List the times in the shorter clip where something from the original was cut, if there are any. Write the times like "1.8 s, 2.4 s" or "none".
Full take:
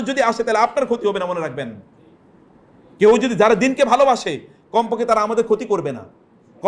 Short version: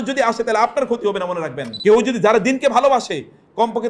1.6 s